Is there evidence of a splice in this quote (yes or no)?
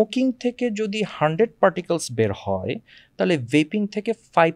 no